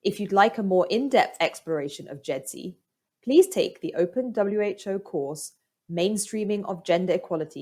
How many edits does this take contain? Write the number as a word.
one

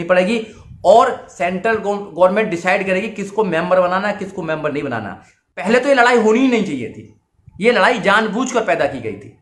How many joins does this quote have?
one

